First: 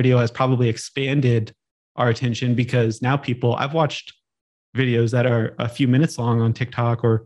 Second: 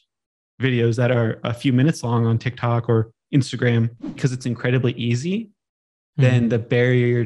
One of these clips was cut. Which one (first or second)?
second